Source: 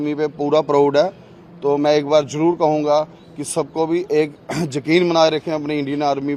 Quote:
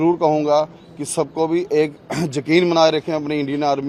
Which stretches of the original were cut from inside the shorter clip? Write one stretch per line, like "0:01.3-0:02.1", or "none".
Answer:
none